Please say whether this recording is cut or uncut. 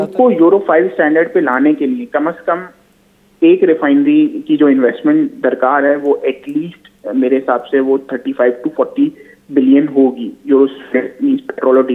uncut